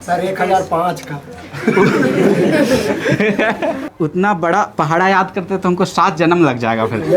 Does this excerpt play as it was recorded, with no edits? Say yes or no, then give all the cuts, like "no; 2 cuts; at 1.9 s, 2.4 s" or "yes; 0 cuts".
no; 1 cut; at 3.9 s